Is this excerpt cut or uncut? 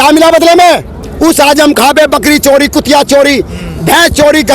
cut